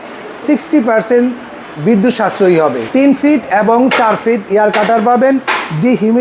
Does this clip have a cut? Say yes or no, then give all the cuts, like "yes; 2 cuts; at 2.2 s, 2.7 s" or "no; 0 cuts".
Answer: yes; 1 cut; at 2.8 s